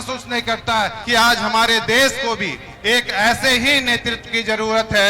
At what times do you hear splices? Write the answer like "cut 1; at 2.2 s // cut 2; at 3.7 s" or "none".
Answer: cut 1; at 1.0 s